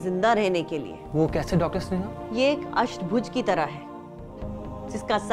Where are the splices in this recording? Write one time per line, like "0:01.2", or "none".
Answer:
0:01.0
0:02.2